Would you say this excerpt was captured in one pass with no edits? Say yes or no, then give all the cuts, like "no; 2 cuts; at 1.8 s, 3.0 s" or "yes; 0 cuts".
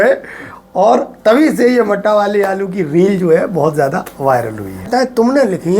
no; 1 cut; at 4.9 s